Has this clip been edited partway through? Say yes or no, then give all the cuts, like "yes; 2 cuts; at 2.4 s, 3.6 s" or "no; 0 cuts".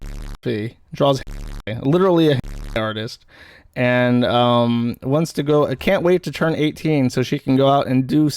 no; 0 cuts